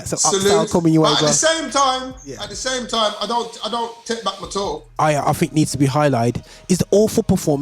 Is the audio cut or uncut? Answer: cut